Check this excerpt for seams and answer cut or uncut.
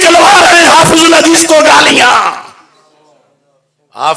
uncut